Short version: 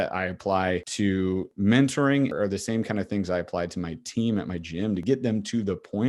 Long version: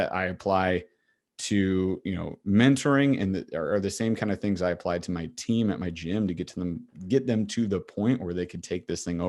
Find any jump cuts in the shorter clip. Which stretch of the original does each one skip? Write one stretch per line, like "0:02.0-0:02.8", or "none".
0:01.4-0:02.3
0:03.2-0:03.6
0:06.3-0:07.0